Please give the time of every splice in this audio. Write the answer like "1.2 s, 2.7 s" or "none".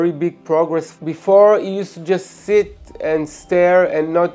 0.9 s